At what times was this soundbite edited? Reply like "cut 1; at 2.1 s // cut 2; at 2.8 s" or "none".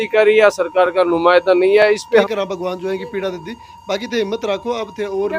cut 1; at 2.2 s

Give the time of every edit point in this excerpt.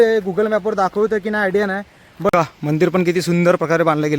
cut 1; at 2.3 s

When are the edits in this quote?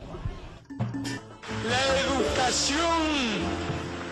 cut 1; at 1.3 s

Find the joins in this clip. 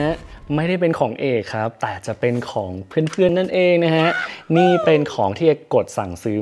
none

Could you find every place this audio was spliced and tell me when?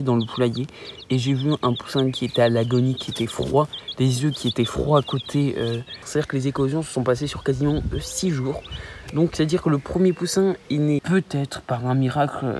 cut 1; at 6.0 s // cut 2; at 11.0 s

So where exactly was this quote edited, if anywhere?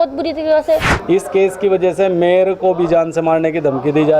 cut 1; at 0.9 s

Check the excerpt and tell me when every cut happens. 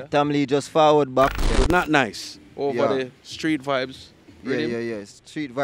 cut 1; at 1.5 s

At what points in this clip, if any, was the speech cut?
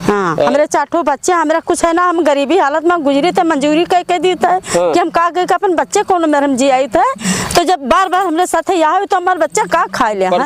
none

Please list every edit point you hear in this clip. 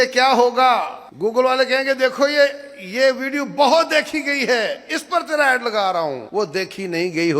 cut 1; at 1.0 s // cut 2; at 6.2 s

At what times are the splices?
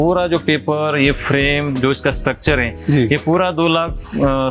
none

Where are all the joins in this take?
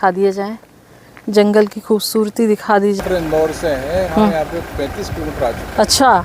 cut 1; at 3.0 s

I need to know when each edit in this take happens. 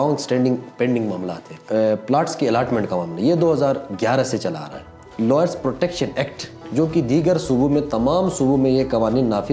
cut 1; at 1.6 s // cut 2; at 5.0 s

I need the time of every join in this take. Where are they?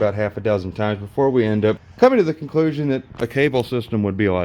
cut 1; at 1.9 s

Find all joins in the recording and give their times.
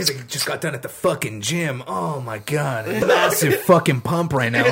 cut 1; at 3.0 s

